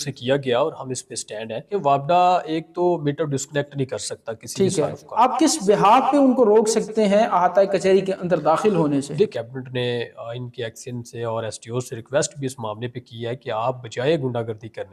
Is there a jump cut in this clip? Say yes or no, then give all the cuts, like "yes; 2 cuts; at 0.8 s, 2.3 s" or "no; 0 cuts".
yes; 3 cuts; at 1.7 s, 5.1 s, 9.3 s